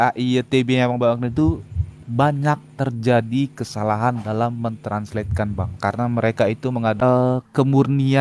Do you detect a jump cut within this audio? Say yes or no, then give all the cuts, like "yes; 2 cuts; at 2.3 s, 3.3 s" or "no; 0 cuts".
yes; 1 cut; at 7.0 s